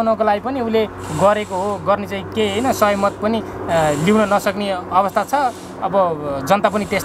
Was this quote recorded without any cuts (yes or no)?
yes